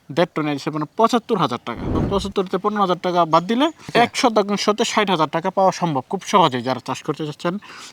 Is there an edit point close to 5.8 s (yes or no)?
no